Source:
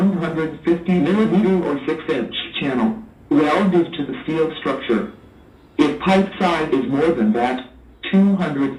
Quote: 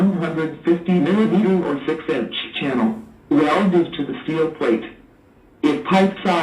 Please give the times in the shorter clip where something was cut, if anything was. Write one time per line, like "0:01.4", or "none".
0:04.9